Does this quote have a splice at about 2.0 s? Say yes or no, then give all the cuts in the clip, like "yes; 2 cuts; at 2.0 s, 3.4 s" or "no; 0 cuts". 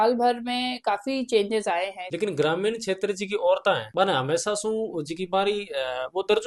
yes; 1 cut; at 2.0 s